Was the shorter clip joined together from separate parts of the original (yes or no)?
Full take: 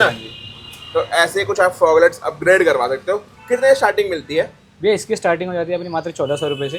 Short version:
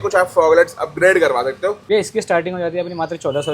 yes